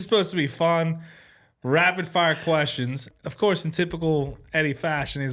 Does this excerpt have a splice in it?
yes; 1 cut; at 3.1 s

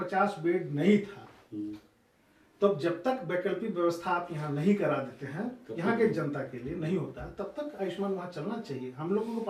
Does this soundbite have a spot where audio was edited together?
no; 0 cuts

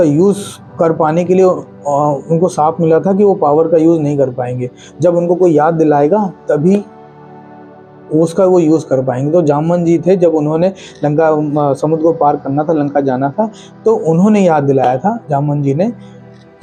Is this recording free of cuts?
yes; 0 cuts

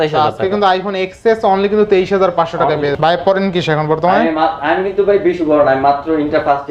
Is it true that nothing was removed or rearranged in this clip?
yes; 0 cuts

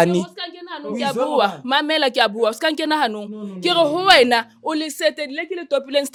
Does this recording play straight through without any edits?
yes; 0 cuts

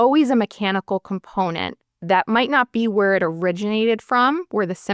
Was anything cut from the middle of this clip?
no; 0 cuts

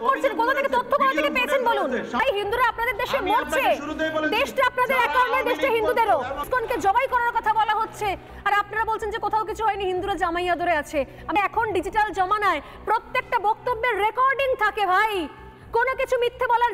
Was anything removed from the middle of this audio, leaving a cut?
yes; 3 cuts; at 2.2 s, 6.5 s, 11.3 s

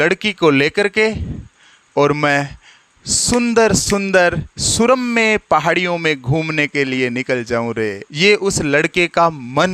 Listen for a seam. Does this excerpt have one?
yes; 1 cut; at 8.0 s

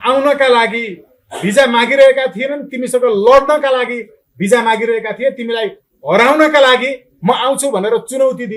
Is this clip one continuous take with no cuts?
yes; 0 cuts

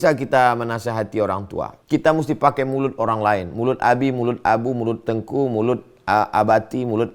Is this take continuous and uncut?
no; 1 cut; at 1.8 s

